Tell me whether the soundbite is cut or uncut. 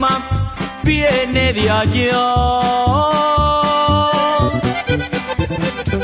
uncut